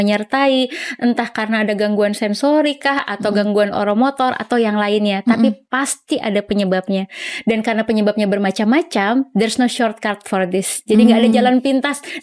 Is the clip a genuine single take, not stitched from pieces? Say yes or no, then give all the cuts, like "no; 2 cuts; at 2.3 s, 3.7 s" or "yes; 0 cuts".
yes; 0 cuts